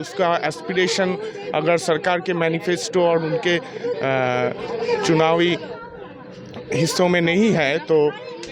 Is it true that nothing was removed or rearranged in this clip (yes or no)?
yes